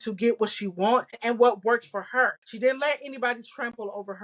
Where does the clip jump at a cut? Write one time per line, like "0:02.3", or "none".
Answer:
0:01.2
0:02.4